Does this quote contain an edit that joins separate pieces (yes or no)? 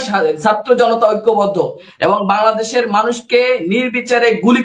no